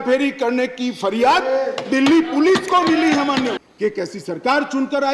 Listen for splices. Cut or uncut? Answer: cut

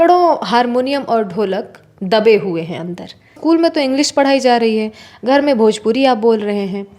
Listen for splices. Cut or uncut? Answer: cut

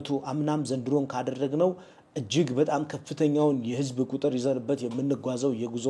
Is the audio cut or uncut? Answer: uncut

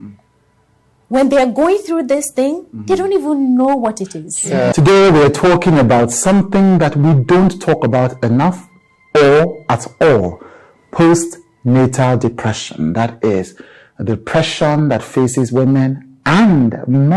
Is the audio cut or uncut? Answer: uncut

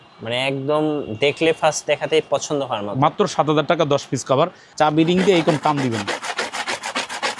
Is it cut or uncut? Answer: cut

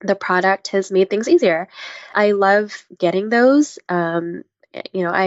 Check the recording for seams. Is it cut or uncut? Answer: cut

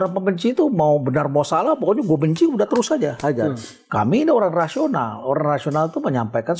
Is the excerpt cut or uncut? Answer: uncut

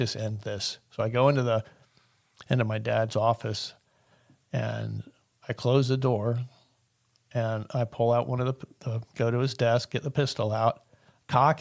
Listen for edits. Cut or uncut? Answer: uncut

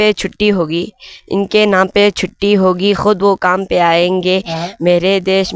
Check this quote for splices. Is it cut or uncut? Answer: uncut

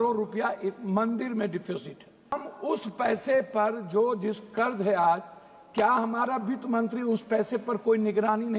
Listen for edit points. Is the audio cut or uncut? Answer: cut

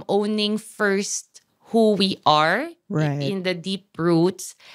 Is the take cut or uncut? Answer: uncut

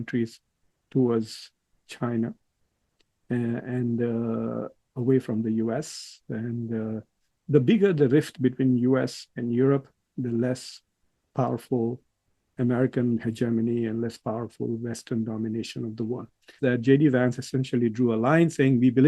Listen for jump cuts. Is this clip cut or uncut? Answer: cut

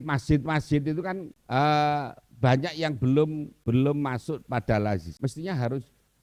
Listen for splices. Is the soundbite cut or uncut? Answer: cut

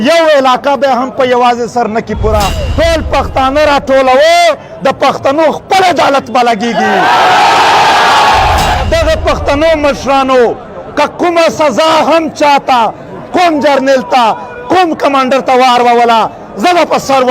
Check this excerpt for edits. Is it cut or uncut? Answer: cut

